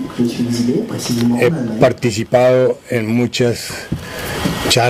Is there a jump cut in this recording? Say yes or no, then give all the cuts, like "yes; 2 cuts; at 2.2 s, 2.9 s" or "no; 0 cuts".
no; 0 cuts